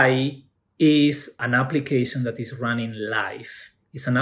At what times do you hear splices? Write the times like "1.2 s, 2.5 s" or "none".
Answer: 1.4 s

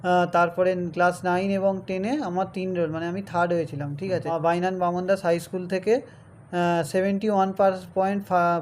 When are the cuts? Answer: 4.3 s

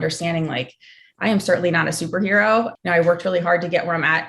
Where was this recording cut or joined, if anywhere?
2.7 s

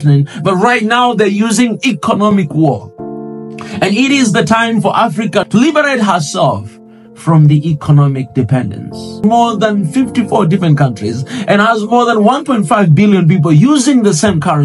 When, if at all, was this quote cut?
5.5 s, 9.2 s

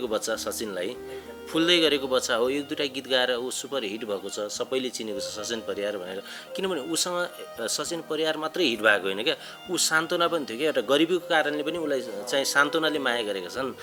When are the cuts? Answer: none

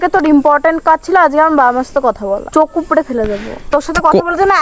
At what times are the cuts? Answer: 2.4 s, 3.7 s

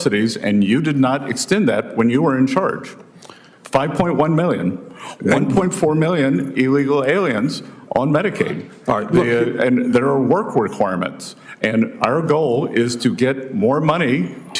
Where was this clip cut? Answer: none

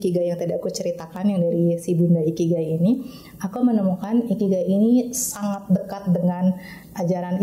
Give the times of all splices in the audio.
none

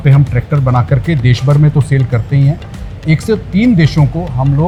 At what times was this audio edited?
none

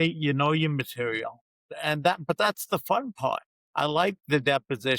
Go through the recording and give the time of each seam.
1.7 s, 3.6 s

